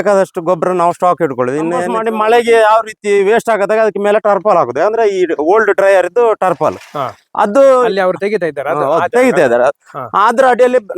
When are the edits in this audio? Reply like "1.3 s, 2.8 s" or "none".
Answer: 1.9 s